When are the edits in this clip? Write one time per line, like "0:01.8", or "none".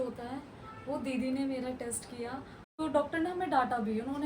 0:02.8